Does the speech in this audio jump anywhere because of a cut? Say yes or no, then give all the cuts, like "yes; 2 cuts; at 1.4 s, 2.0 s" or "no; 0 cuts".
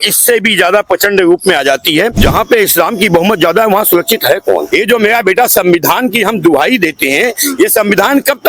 yes; 2 cuts; at 2.2 s, 4.7 s